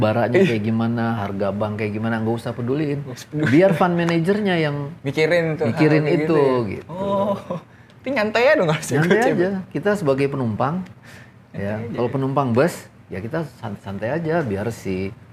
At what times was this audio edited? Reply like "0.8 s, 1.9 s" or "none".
none